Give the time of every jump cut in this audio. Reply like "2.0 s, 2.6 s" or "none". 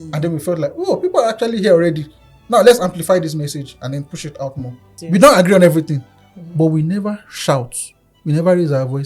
4.9 s